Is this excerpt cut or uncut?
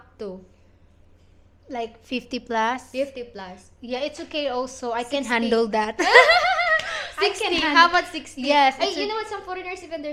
uncut